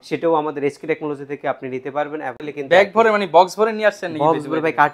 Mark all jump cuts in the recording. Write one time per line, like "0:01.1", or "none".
0:02.5